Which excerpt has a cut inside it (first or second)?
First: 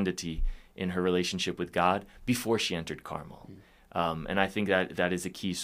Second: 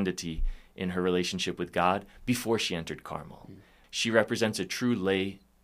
second